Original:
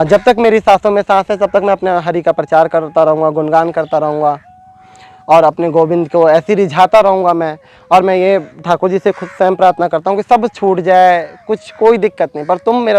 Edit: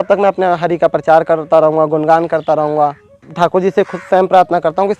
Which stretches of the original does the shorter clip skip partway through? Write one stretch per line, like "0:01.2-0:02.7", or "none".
0:04.7-0:08.5